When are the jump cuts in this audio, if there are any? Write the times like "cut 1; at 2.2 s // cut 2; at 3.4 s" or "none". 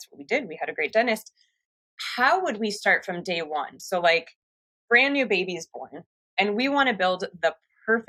none